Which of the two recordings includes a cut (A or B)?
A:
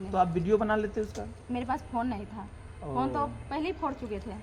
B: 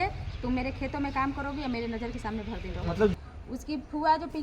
B